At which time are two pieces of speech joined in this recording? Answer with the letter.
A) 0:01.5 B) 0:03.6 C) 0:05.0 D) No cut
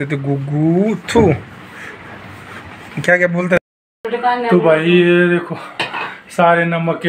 B